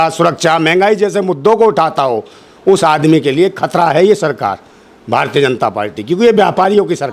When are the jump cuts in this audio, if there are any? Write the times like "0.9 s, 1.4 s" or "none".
none